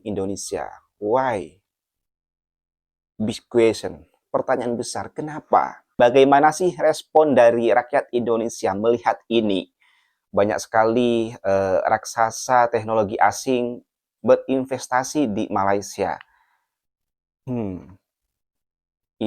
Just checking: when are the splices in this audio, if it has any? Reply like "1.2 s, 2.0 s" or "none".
5.9 s